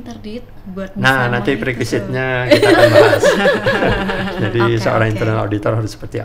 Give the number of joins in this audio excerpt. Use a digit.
0